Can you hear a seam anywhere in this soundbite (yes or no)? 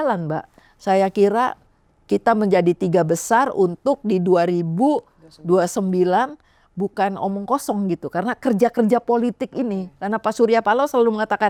no